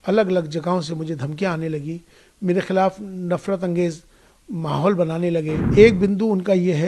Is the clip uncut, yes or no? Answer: no